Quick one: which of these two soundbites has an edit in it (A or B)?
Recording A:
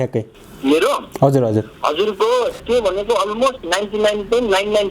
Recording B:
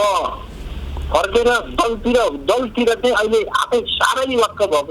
A